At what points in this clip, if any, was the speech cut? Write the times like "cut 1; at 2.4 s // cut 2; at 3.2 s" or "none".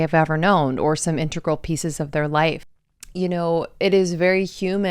cut 1; at 2.7 s

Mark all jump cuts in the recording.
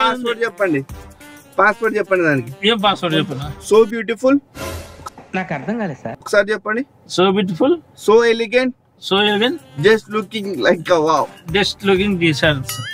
none

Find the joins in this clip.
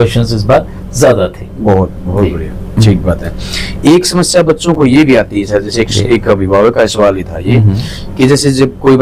none

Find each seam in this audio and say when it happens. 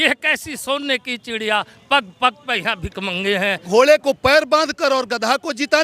cut 1; at 3.6 s

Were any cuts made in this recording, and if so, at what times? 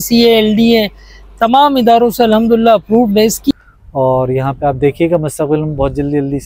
cut 1; at 3.5 s

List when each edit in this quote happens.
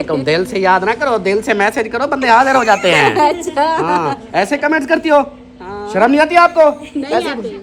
none

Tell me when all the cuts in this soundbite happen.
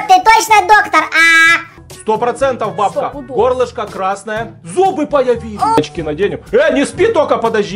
cut 1; at 5.8 s

